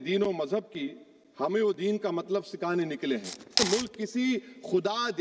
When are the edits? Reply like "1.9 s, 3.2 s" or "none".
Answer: 3.6 s

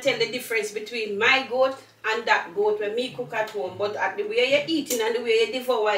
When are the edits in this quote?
none

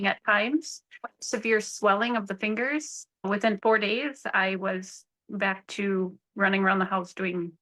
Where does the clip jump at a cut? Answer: 3.1 s

